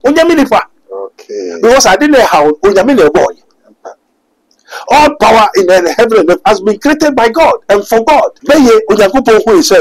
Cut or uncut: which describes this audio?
cut